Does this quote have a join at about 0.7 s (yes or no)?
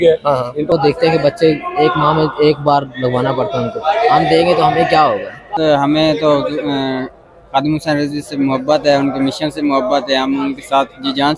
yes